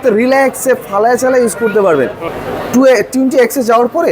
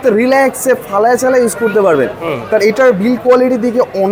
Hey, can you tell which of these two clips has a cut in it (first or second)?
first